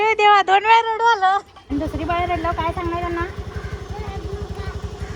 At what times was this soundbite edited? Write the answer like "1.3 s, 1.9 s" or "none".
1.6 s